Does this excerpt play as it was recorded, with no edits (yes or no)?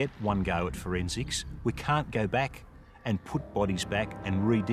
yes